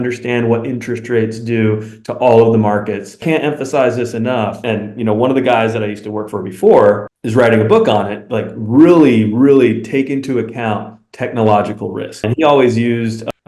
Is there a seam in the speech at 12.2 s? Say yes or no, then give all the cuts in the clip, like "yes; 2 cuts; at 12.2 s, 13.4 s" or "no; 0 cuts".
yes; 3 cuts; at 3.2 s, 4.6 s, 12.2 s